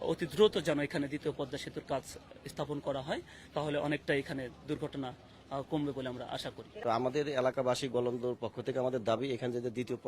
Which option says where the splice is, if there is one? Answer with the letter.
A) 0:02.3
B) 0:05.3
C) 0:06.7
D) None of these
C